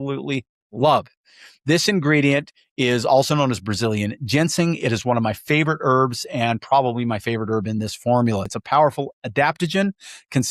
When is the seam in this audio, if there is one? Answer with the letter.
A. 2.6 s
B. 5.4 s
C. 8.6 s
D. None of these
C